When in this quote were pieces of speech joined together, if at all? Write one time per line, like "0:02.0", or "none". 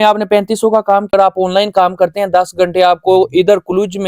0:01.1